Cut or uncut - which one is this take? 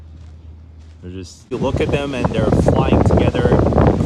cut